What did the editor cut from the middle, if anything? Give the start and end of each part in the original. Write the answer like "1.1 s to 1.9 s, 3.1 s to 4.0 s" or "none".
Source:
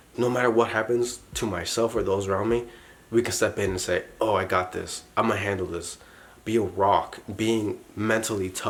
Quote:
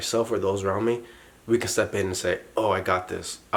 none